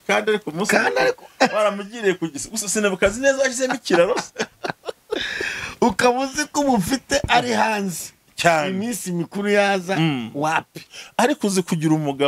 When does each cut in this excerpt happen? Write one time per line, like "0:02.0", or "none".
none